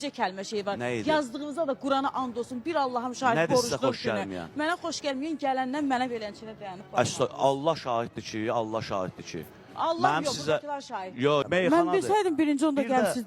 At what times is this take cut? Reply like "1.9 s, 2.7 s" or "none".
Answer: 11.4 s